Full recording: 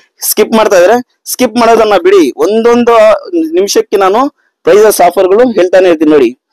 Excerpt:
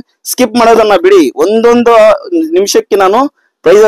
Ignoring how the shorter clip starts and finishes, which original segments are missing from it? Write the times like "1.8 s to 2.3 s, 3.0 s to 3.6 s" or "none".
none